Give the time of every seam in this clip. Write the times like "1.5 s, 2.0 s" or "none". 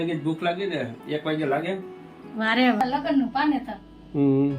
2.8 s